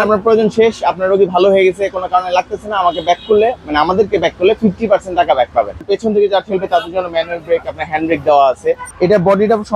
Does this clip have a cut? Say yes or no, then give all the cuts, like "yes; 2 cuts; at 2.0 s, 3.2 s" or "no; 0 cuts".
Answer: yes; 2 cuts; at 5.8 s, 8.9 s